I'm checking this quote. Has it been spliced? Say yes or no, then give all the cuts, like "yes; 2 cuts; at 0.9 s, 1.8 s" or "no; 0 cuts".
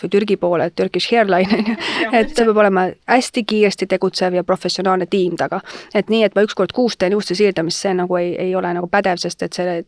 yes; 1 cut; at 1.9 s